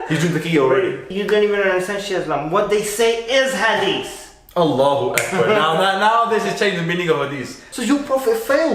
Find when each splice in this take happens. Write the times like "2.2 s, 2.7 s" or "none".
1.1 s, 7.6 s